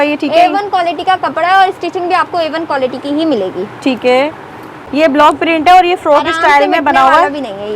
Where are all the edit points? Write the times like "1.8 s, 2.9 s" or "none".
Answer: 4.8 s